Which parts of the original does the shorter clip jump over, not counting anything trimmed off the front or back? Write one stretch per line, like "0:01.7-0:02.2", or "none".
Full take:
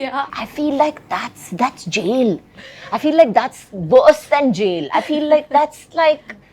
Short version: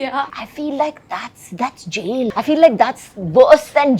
0:02.3-0:02.9